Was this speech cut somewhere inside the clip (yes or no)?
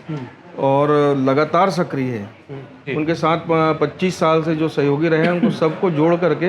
yes